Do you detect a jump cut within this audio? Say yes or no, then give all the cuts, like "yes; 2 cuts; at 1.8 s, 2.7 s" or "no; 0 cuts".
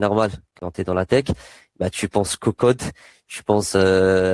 no; 0 cuts